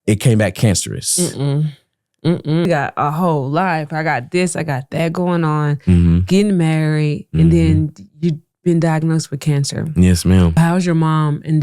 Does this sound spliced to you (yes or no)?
yes